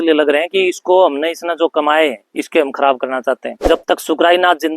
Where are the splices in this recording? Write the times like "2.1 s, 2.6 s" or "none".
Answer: 3.5 s